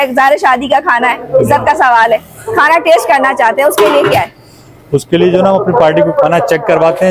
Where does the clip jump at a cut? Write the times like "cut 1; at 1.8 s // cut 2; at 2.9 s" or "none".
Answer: none